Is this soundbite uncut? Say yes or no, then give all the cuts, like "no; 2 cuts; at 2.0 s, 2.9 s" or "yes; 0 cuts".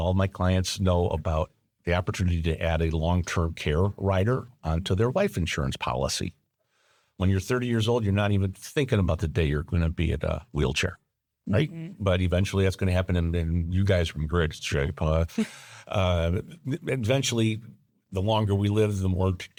yes; 0 cuts